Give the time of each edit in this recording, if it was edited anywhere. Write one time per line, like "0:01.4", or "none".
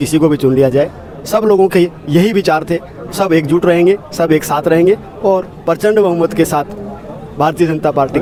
none